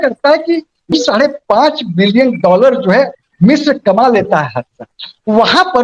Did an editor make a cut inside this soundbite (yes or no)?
yes